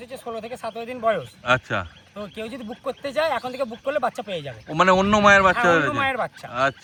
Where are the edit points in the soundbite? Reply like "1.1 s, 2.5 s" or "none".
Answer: none